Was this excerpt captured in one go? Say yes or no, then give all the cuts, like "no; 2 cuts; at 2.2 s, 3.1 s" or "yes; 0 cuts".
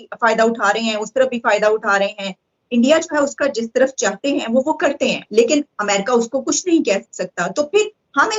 yes; 0 cuts